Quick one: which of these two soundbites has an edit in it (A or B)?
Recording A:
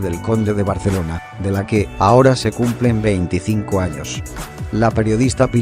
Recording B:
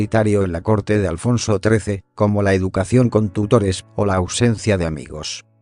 A